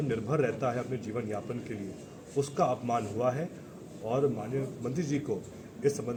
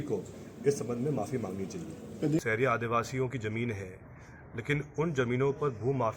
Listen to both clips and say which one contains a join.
second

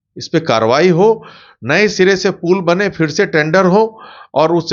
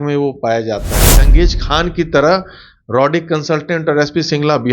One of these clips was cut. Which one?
second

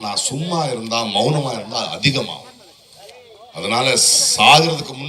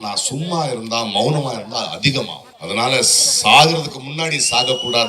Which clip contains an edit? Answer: second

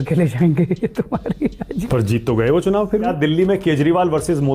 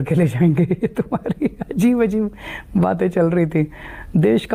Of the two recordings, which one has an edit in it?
first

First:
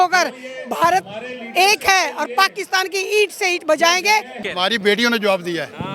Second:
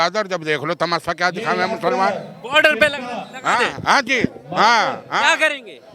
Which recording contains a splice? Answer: first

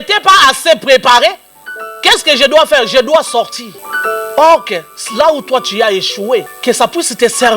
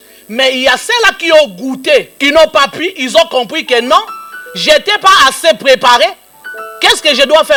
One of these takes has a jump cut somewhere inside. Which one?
first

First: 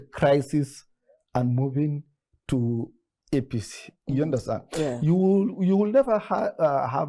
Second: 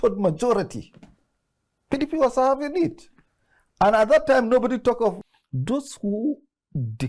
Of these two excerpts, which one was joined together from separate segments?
second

